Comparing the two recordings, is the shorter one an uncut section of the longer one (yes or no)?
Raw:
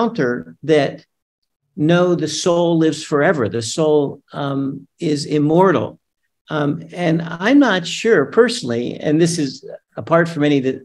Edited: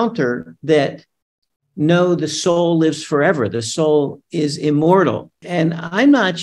no